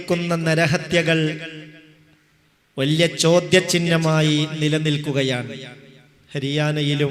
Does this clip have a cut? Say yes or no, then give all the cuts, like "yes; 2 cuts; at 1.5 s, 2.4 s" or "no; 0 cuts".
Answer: no; 0 cuts